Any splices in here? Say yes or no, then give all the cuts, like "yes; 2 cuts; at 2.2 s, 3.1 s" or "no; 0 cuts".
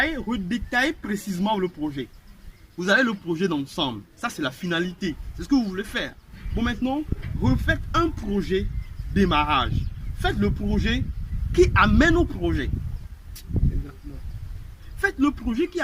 no; 0 cuts